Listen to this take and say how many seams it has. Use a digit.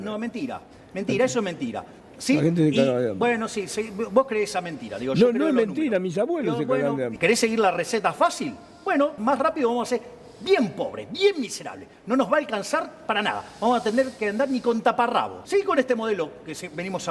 3